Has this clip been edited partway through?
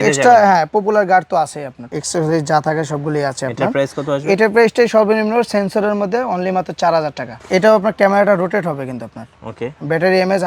yes; 2 cuts; at 1.8 s, 7.3 s

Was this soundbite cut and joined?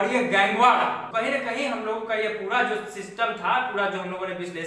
yes; 1 cut; at 1.0 s

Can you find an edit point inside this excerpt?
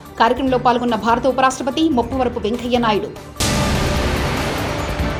no; 0 cuts

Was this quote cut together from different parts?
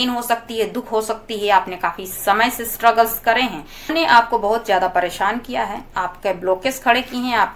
yes; 1 cut; at 3.9 s

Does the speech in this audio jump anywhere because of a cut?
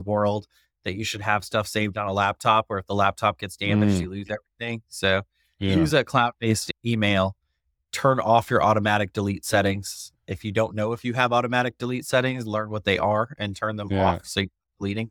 yes; 1 cut; at 6.7 s

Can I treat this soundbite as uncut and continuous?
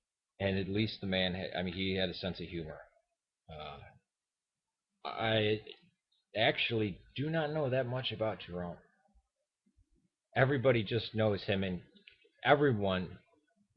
no; 1 cut; at 5.4 s

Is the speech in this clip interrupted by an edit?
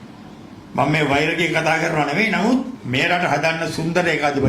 yes; 1 cut; at 2.8 s

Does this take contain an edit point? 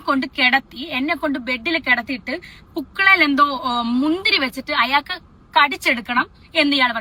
no; 0 cuts

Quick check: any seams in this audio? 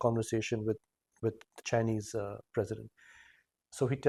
no; 0 cuts

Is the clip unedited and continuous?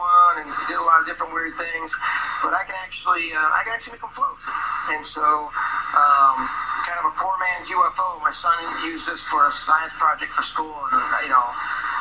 no; 1 cut; at 2.0 s

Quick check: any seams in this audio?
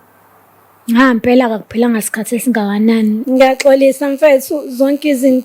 yes; 1 cut; at 3.2 s

